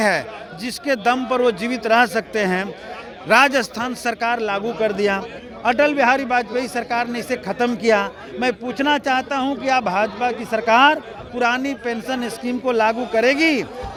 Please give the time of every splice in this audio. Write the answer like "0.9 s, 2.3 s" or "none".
none